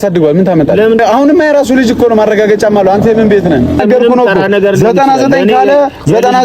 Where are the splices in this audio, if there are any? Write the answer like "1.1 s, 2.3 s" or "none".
1.0 s, 3.8 s